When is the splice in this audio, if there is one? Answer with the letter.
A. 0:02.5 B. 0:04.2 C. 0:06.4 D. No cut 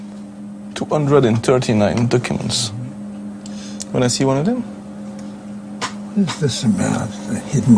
B